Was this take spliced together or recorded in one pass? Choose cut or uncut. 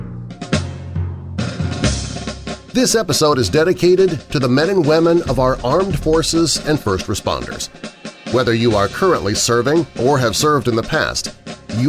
cut